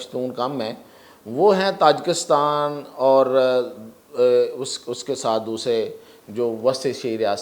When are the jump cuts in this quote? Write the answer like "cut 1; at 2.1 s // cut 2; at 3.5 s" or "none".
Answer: none